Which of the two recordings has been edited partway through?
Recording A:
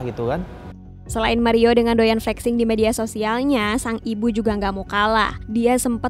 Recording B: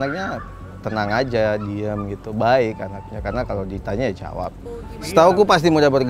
A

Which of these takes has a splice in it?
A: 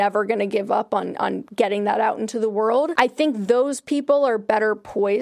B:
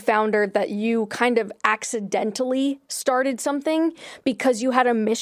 A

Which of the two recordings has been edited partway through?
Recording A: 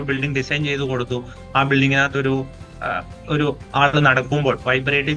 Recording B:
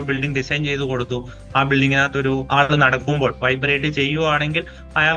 B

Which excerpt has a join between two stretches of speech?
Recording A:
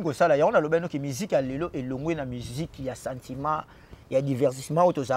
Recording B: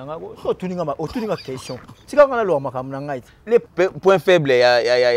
B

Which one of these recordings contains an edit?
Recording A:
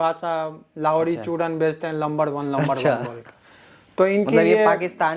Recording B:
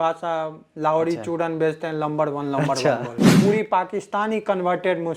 B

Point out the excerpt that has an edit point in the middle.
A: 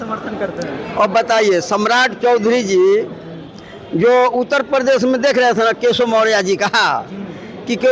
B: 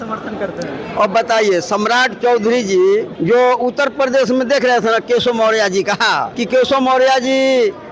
B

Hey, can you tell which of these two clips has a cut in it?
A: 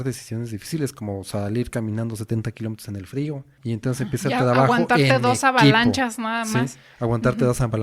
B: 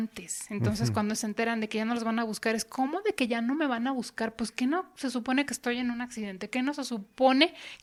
A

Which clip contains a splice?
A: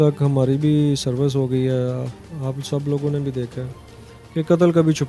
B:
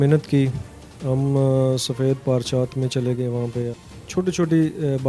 B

